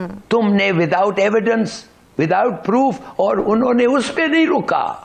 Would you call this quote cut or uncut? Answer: uncut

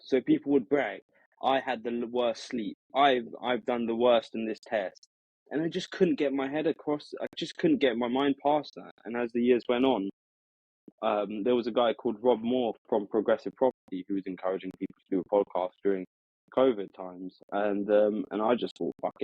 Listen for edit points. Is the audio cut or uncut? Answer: cut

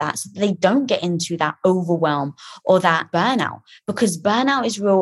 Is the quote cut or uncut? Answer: cut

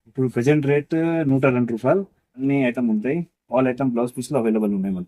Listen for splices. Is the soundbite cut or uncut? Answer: cut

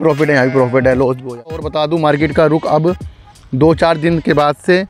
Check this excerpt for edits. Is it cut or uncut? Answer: cut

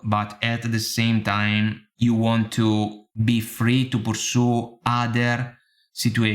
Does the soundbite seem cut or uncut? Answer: cut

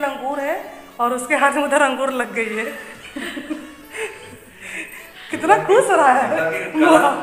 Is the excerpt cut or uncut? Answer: uncut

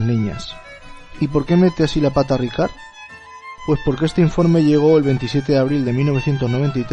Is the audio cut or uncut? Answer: cut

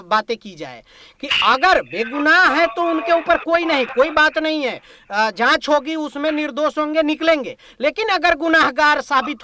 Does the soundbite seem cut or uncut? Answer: uncut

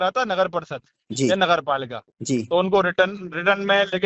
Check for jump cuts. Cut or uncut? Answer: uncut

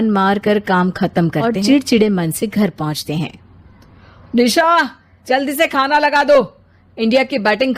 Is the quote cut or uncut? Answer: cut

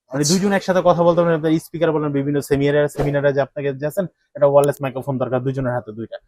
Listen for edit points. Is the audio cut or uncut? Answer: uncut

